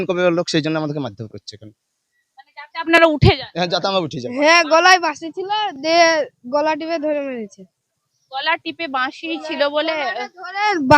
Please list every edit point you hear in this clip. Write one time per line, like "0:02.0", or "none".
0:04.2